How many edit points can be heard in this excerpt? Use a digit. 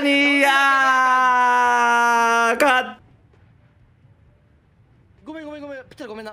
1